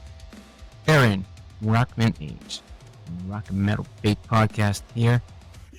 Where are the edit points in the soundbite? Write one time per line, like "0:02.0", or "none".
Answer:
none